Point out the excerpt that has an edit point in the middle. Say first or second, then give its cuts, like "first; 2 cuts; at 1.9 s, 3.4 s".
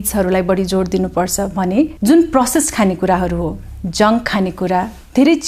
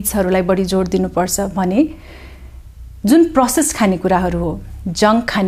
first; 1 cut; at 1.9 s